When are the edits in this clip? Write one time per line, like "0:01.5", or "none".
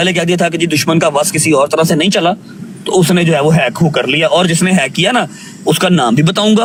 none